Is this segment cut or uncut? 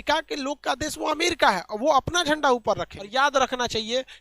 cut